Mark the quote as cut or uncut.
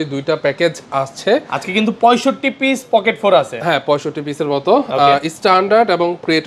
uncut